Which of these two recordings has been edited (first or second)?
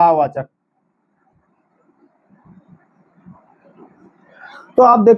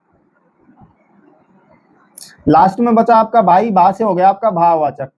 second